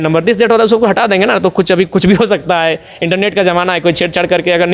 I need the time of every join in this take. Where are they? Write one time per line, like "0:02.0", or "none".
none